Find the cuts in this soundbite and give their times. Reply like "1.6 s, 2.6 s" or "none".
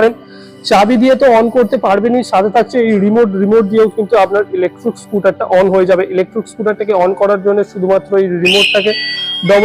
none